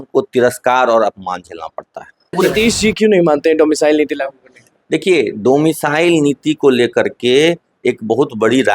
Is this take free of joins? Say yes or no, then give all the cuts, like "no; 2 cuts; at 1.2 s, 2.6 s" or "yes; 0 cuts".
no; 1 cut; at 2.4 s